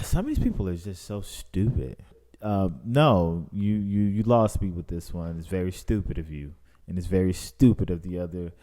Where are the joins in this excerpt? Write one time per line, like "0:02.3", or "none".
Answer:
0:02.3